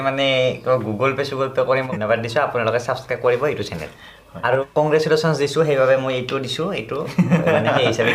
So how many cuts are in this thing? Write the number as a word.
two